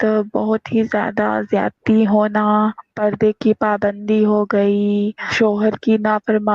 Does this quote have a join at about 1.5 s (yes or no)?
no